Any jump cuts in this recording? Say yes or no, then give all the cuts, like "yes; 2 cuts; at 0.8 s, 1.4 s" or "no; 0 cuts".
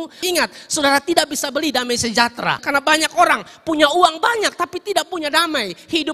yes; 1 cut; at 2.6 s